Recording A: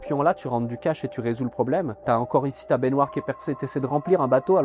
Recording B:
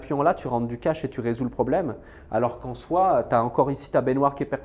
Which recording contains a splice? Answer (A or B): A